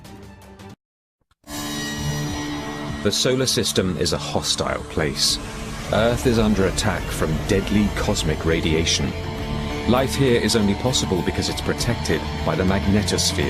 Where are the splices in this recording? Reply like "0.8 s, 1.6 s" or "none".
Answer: 7.4 s